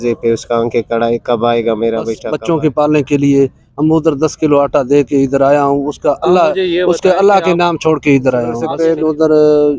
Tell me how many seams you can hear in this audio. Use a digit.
2